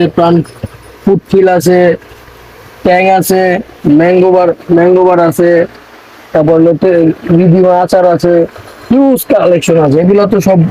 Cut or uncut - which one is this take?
uncut